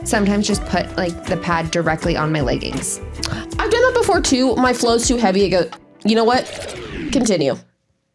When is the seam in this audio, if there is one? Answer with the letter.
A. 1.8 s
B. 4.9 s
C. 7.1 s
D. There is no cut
D